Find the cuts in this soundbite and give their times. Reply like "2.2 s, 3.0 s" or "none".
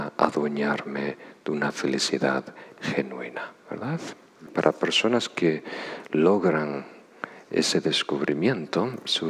4.4 s